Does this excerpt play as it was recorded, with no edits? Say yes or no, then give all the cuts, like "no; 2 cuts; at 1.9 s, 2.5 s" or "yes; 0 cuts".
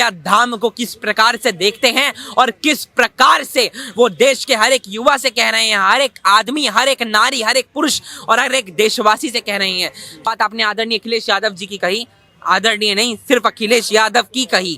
no; 1 cut; at 10.3 s